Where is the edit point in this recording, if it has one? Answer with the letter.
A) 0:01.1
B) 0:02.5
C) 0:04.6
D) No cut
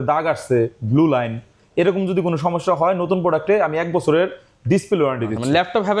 D